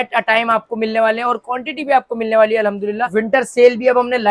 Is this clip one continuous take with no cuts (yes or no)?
no